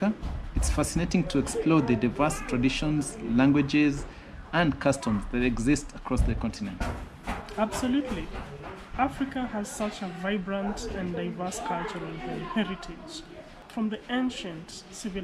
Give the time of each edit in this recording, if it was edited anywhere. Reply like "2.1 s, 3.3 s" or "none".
7.5 s